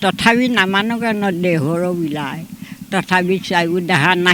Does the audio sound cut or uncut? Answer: uncut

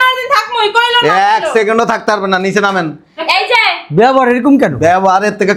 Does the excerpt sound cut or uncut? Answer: uncut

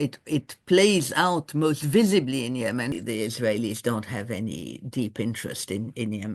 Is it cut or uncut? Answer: cut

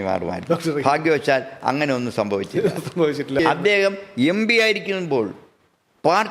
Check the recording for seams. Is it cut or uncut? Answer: cut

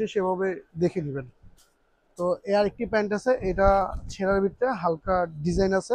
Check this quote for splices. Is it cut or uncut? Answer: uncut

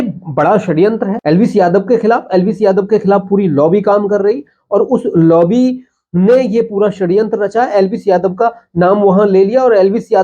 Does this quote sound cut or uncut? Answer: cut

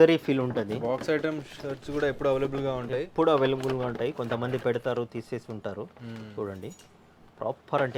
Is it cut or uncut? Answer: uncut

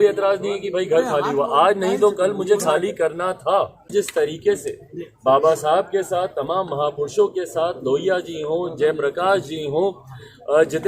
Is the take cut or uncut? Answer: cut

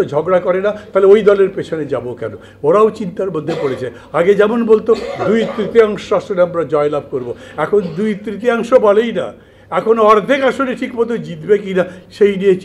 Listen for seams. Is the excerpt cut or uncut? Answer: uncut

